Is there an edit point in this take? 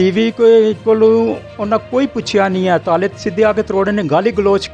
no; 0 cuts

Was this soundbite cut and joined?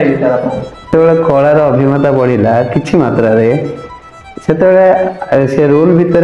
yes; 1 cut; at 0.9 s

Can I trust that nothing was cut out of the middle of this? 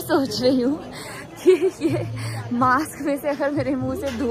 yes; 0 cuts

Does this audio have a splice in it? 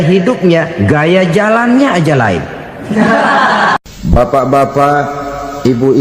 yes; 1 cut; at 3.8 s

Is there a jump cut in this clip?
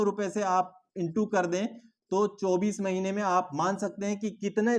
no; 0 cuts

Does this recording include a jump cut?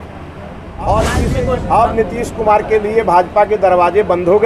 yes; 1 cut; at 1.3 s

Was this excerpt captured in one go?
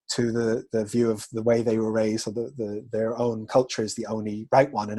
yes; 0 cuts

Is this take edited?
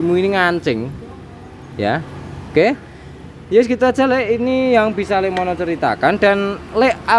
no; 0 cuts

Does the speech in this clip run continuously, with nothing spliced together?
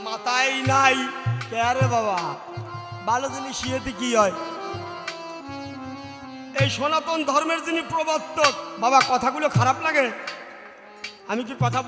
yes; 0 cuts

